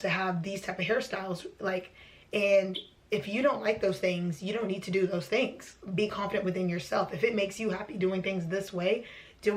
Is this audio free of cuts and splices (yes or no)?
yes